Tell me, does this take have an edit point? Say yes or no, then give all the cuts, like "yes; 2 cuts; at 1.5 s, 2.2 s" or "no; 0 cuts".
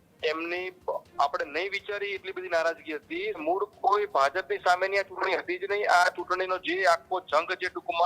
yes; 1 cut; at 3.4 s